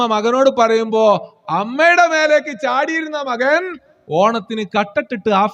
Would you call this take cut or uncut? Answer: uncut